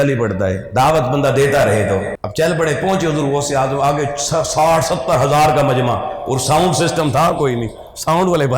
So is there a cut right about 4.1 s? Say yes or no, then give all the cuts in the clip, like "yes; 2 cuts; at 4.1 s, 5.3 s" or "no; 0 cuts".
no; 1 cut; at 2.2 s